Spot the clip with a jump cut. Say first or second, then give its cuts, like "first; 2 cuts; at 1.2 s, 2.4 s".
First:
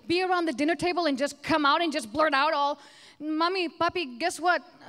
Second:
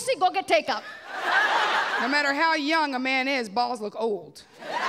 second; 1 cut; at 2.0 s